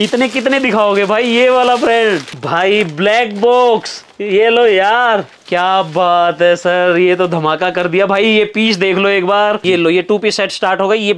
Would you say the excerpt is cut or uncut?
cut